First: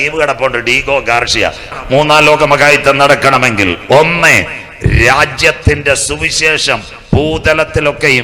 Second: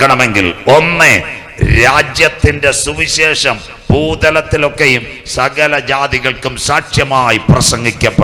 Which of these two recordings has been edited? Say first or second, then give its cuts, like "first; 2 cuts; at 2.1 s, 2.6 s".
first; 1 cut; at 1.7 s